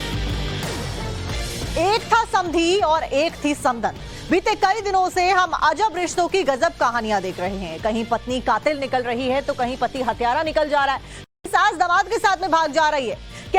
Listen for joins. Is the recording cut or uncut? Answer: cut